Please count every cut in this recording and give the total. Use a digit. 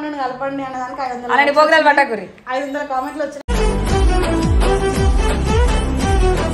0